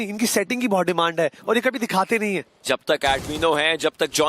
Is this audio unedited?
no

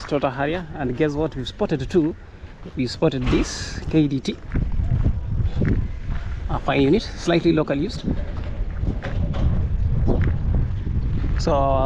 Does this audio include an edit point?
no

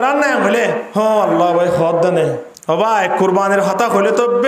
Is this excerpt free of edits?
no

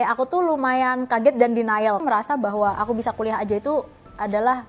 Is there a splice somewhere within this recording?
yes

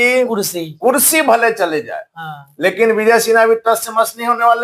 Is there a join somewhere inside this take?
no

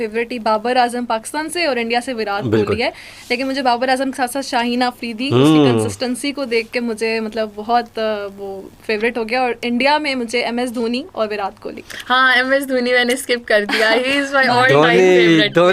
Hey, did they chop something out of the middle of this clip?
no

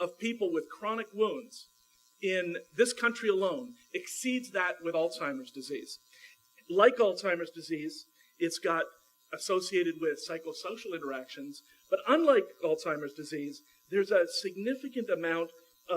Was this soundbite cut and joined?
yes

